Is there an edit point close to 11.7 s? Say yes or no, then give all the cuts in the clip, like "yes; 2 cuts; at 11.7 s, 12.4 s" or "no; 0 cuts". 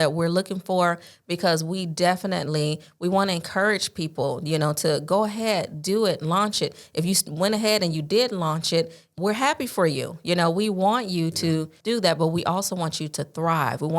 yes; 2 cuts; at 9.1 s, 11.7 s